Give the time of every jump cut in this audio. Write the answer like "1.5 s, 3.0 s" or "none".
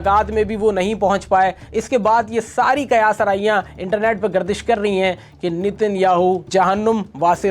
6.5 s